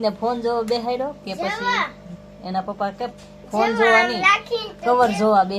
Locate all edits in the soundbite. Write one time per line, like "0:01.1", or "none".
none